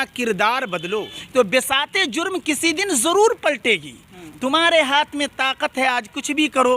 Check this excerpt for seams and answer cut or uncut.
cut